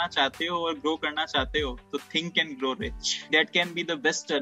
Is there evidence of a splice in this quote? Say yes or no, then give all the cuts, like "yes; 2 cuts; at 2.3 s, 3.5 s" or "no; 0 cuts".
yes; 1 cut; at 3.3 s